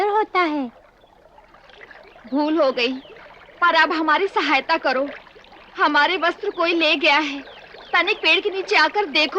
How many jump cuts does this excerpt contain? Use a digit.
1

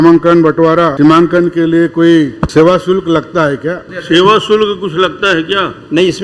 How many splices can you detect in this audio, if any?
3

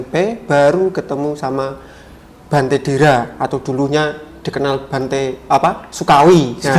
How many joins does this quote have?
0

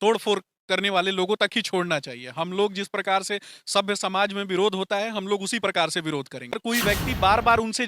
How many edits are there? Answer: 1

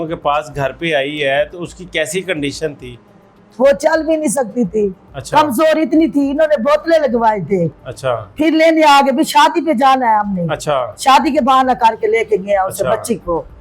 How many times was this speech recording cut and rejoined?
0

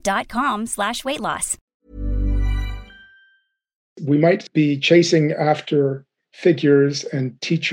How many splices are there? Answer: 2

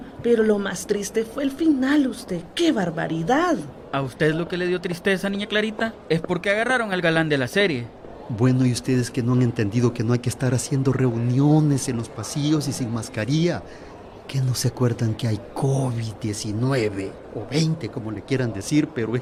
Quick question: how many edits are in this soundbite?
0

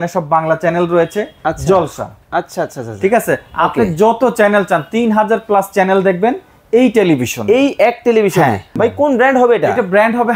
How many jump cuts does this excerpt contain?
1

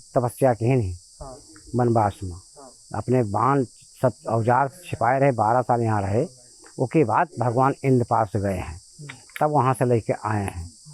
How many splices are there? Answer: 0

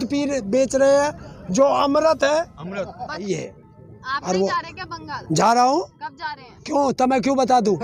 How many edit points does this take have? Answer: 1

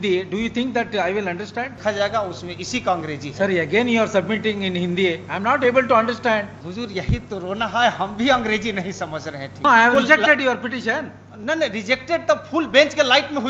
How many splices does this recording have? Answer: 3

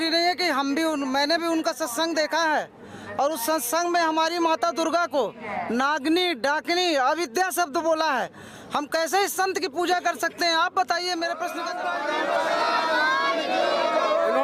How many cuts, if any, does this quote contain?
1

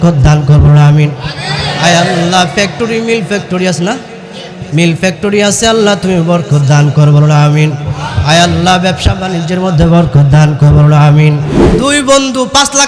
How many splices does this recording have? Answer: 1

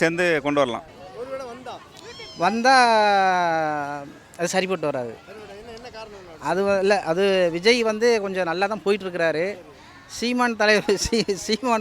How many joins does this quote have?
1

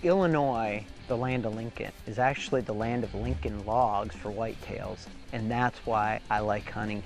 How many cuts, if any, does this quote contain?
2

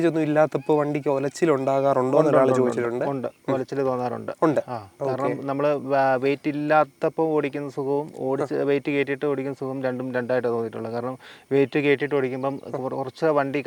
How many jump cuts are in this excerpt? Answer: 0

